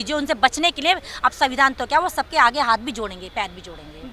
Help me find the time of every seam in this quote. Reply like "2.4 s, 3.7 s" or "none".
none